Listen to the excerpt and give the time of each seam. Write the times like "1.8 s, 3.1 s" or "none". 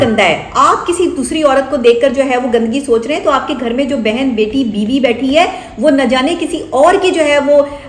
none